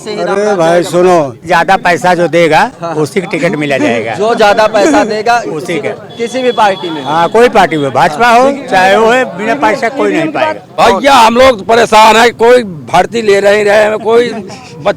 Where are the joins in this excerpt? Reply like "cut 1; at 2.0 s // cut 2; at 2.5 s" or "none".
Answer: cut 1; at 1.5 s // cut 2; at 10.7 s